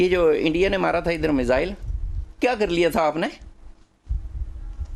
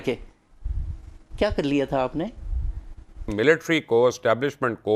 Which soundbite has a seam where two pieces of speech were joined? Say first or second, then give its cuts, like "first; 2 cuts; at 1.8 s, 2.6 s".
second; 1 cut; at 3.3 s